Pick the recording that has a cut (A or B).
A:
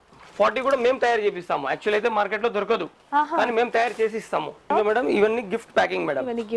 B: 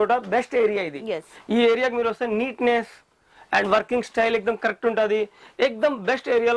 A